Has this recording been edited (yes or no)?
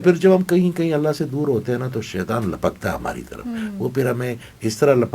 no